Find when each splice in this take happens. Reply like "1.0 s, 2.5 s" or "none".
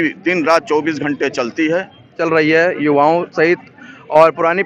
2.2 s